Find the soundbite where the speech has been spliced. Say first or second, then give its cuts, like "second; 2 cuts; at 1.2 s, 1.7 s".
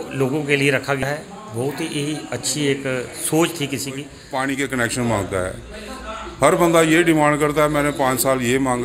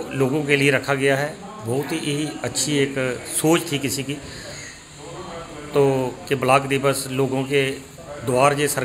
first; 2 cuts; at 1.0 s, 4.2 s